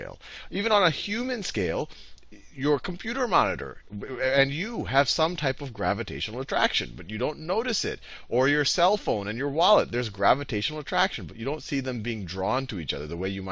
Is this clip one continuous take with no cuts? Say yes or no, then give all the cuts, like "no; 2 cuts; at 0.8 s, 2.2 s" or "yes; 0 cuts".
no; 1 cut; at 9.6 s